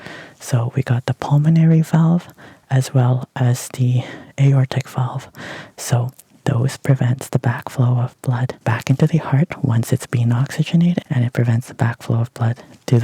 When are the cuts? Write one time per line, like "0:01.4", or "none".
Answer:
0:08.6
0:11.1